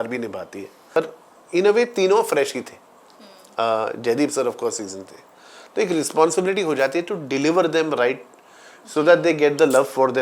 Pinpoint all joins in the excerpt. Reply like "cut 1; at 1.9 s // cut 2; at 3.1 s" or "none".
cut 1; at 1.0 s